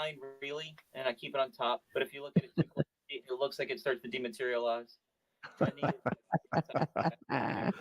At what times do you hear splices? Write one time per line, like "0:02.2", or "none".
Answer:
0:01.9

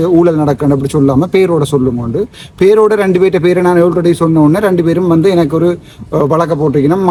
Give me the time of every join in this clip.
none

